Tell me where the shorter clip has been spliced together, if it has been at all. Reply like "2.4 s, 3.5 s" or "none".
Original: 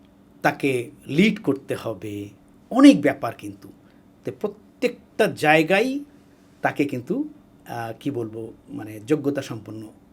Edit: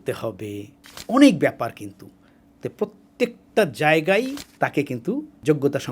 4.9 s

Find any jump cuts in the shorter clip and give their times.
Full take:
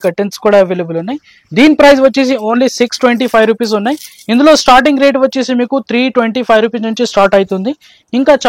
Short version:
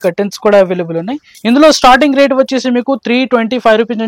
1.3 s

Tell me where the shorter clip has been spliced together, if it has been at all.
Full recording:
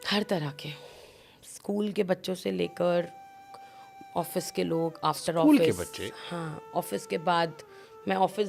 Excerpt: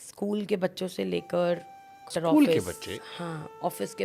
2.1 s

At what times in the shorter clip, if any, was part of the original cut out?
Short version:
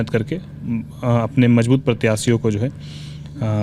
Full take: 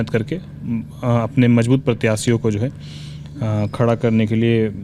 none

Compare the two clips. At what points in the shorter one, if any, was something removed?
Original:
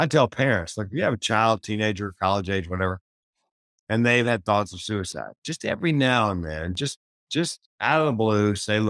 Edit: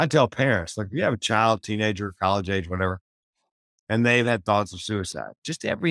none

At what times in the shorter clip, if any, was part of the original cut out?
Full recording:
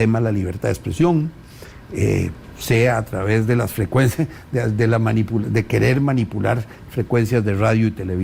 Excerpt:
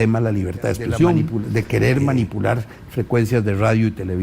1.3 s

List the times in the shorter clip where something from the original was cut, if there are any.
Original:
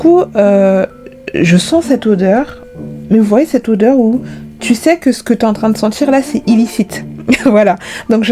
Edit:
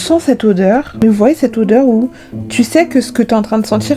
0.9 s

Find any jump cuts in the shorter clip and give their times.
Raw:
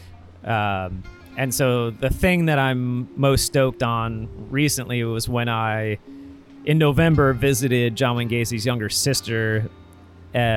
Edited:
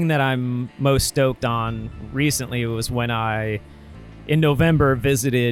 none

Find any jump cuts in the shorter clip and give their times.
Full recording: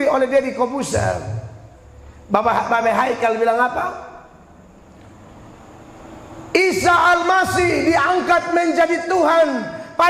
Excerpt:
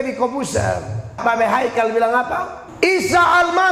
1.2 s, 2.6 s

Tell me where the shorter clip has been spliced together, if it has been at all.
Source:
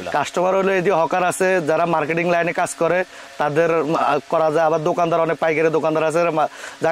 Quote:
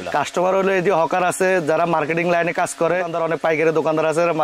3.1 s

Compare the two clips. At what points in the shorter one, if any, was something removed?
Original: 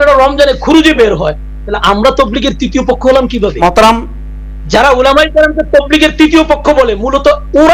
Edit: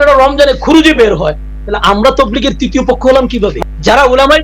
3.5 s

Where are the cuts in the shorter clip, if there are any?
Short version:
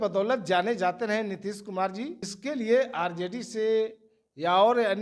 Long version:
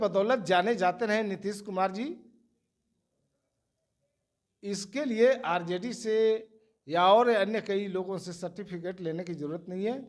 2.3 s

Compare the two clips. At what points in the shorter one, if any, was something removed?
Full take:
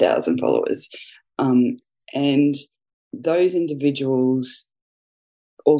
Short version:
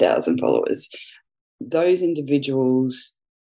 1.2 s

